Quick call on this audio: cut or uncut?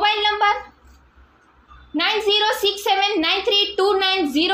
uncut